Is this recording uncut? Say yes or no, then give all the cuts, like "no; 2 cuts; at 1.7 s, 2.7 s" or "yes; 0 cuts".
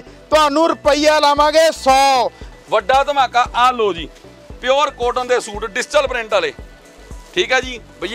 no; 1 cut; at 2.5 s